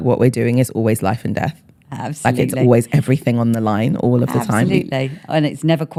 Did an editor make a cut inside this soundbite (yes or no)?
no